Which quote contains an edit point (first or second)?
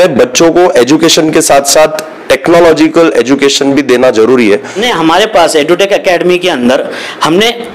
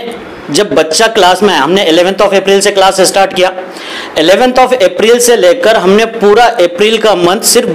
first